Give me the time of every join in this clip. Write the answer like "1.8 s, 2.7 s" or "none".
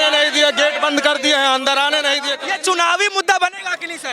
2.3 s